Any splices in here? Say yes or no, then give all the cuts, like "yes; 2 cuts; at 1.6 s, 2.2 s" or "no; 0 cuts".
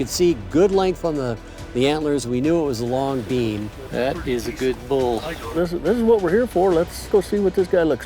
yes; 3 cuts; at 3.8 s, 5.5 s, 7.1 s